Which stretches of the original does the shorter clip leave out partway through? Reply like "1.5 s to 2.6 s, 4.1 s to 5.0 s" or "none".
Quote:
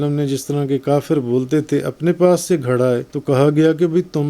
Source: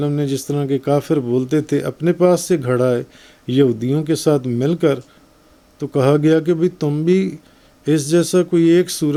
3.1 s to 5.8 s